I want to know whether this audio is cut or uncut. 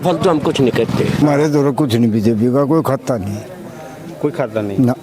cut